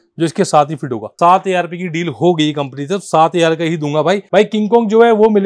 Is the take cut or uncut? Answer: cut